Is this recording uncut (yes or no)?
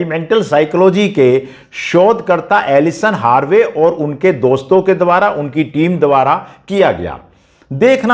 yes